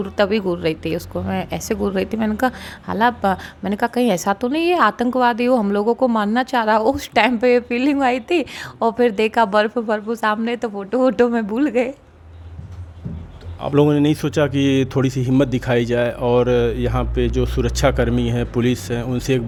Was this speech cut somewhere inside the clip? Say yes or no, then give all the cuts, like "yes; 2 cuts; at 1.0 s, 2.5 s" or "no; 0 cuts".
no; 0 cuts